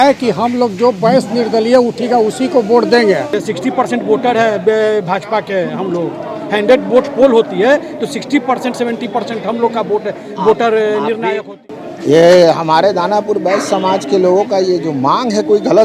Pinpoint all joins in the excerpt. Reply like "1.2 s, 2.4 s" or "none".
3.4 s, 11.5 s